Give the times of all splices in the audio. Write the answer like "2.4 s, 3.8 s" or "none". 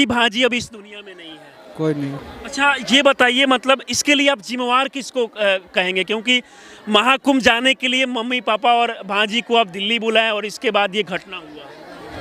none